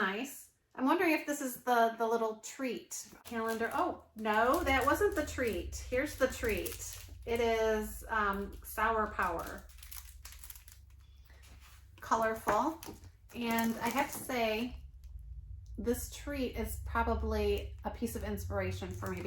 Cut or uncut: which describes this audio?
cut